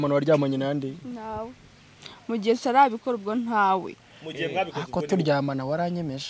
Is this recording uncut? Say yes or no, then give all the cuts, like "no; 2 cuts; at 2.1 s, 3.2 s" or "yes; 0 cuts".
yes; 0 cuts